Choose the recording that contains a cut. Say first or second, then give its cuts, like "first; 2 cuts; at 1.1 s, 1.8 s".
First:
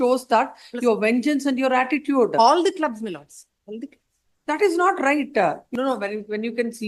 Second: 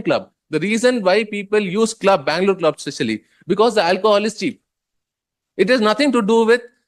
first; 1 cut; at 5.6 s